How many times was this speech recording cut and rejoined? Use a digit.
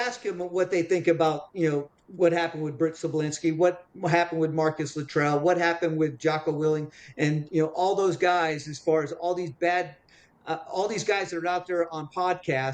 0